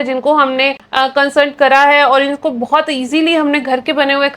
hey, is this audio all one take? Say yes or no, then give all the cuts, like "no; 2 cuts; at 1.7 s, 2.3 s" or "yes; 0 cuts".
yes; 0 cuts